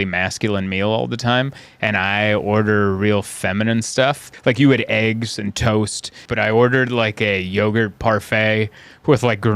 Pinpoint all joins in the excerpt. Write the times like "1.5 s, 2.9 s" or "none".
4.3 s, 6.2 s